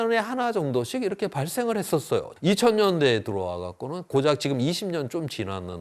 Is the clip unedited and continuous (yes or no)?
no